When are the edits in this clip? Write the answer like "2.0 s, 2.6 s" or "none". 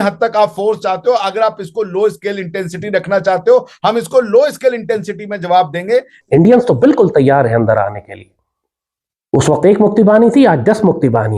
6.1 s